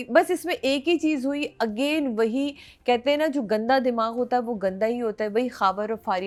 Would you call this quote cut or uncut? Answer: uncut